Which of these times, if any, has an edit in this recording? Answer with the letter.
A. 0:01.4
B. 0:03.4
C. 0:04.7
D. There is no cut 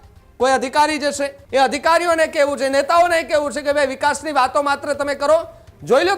A